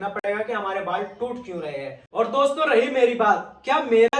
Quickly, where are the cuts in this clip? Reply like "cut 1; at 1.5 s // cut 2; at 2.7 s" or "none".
cut 1; at 2.0 s